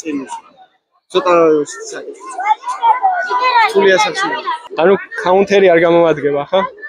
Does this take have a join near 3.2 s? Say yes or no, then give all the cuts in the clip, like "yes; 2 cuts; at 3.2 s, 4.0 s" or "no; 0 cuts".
no; 0 cuts